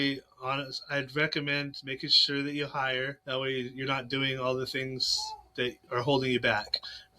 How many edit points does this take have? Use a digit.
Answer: 2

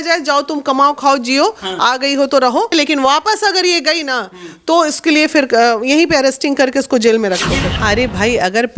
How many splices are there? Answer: 2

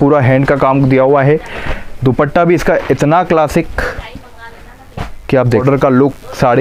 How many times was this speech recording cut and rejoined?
1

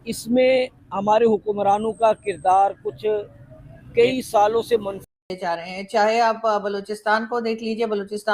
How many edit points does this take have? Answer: 1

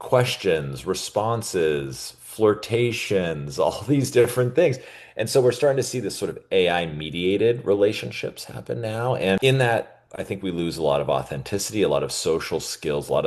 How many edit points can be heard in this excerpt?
1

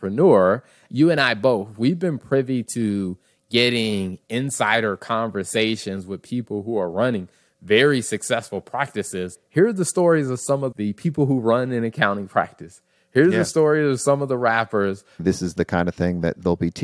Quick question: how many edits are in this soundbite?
4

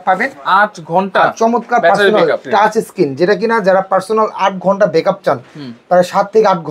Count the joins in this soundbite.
1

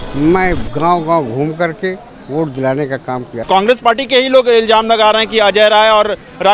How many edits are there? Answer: 1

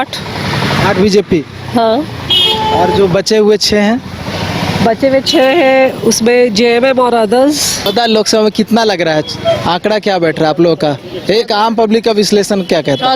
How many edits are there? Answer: 1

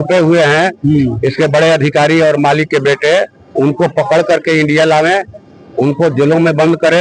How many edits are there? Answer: 0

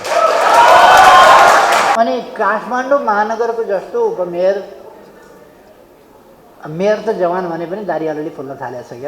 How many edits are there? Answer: 1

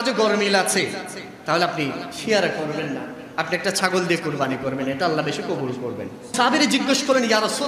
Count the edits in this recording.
1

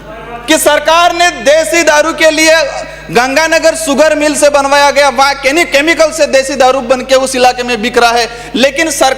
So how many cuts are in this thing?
0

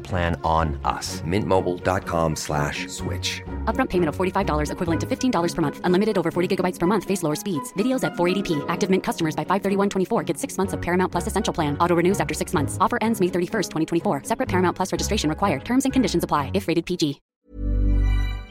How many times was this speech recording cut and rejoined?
1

